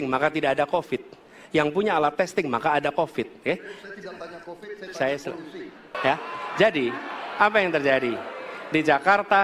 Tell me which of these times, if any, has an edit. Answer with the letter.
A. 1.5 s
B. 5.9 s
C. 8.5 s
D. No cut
B